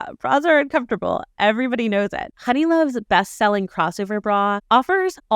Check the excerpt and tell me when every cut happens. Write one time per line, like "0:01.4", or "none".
0:02.3